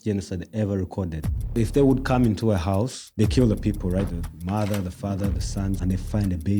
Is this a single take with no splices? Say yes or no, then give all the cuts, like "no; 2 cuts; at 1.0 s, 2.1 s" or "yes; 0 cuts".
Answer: no; 4 cuts; at 1.6 s, 3.0 s, 4.1 s, 5.8 s